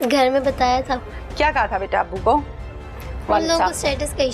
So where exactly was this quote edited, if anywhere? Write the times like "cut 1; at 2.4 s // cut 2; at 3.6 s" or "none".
cut 1; at 1.1 s